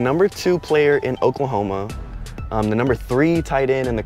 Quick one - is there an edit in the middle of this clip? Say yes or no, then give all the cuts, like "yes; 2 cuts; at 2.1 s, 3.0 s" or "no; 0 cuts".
no; 0 cuts